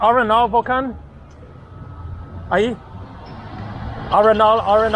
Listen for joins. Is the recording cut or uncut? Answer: uncut